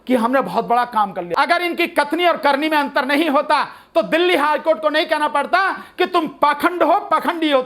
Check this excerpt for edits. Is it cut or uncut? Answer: cut